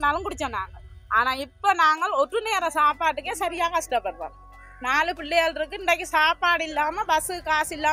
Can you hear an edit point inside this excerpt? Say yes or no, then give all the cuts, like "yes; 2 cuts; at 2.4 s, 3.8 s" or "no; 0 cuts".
no; 0 cuts